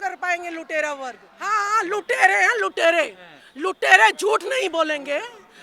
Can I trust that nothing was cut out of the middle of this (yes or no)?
no